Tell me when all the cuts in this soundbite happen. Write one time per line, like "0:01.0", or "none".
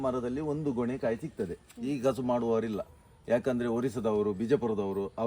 0:01.7